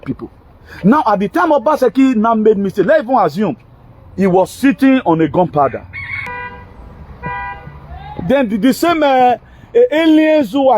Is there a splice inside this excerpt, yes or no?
yes